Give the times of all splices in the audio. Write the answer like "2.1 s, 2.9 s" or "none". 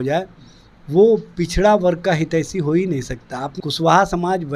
3.5 s

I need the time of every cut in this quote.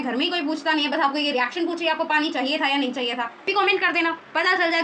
3.5 s

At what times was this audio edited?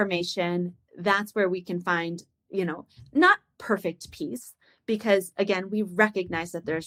none

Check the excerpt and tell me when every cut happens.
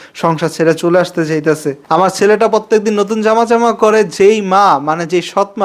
1.8 s

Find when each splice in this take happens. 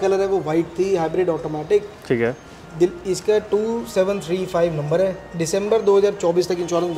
none

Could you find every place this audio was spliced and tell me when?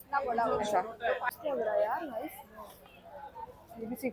1.3 s

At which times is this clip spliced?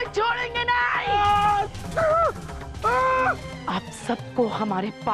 3.4 s

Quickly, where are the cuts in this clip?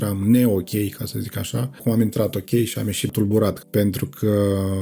1.8 s, 3.1 s

